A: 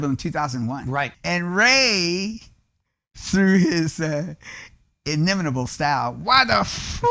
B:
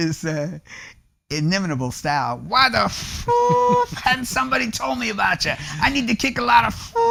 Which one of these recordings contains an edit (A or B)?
A